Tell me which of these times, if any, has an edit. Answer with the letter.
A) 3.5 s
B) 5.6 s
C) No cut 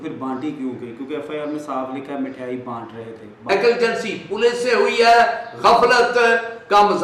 A